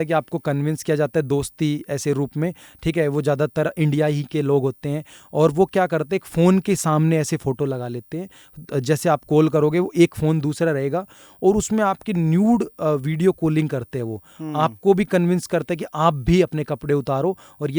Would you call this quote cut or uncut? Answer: uncut